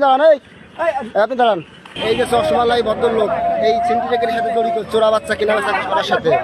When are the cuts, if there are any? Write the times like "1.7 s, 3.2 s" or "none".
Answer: 2.0 s